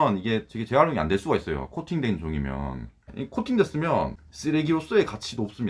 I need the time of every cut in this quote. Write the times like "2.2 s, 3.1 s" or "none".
3.2 s, 4.2 s

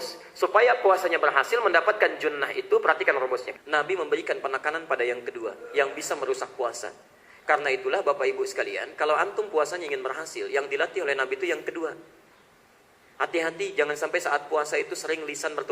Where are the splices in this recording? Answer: 3.5 s

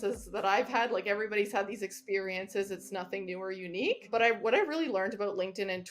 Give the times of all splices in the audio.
4.0 s

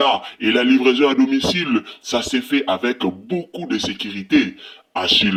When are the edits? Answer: none

